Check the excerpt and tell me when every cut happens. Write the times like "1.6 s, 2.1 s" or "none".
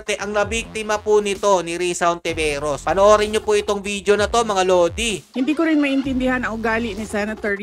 none